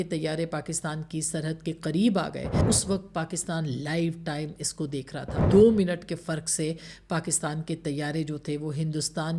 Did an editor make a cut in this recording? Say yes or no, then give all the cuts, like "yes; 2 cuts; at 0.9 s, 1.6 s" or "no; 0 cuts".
yes; 2 cuts; at 2.6 s, 5.4 s